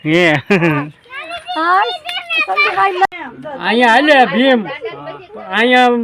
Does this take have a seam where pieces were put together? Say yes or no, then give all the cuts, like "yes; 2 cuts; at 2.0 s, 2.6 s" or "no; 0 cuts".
yes; 1 cut; at 3.1 s